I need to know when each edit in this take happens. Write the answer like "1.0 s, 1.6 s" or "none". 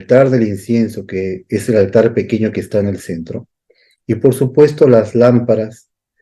none

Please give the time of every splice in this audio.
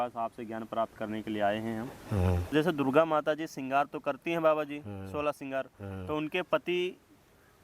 2.5 s

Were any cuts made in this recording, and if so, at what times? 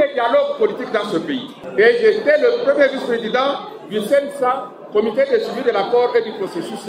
1.6 s

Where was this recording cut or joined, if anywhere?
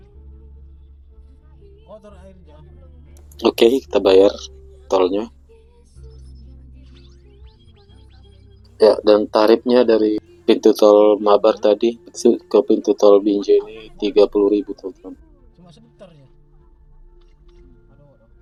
none

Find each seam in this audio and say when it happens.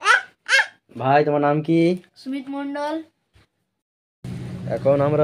4.0 s

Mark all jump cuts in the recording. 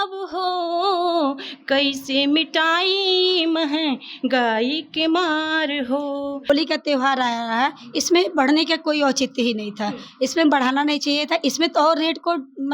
6.5 s

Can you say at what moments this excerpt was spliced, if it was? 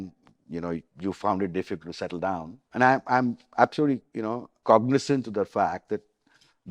0.9 s, 2.6 s, 4.5 s

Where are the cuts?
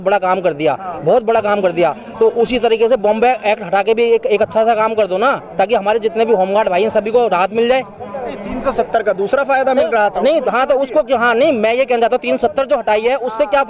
none

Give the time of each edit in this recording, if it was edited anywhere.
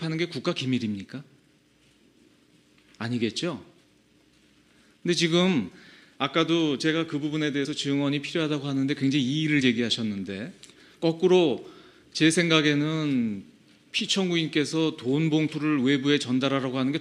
11.5 s

